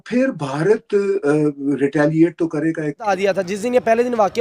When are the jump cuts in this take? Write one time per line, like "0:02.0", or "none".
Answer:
0:03.1